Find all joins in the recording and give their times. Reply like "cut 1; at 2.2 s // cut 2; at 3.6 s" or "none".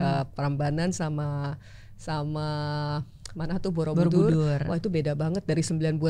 none